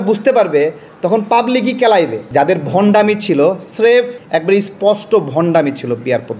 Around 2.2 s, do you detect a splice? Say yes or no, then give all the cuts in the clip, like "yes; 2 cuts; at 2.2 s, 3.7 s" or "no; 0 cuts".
yes; 1 cut; at 2.2 s